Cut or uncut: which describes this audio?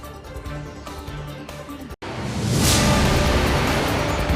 cut